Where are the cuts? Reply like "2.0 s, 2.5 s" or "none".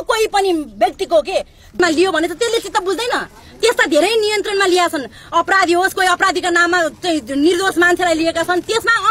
1.8 s